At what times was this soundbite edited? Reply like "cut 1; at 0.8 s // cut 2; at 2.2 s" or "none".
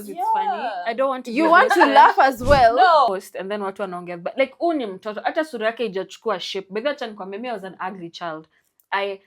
cut 1; at 3.1 s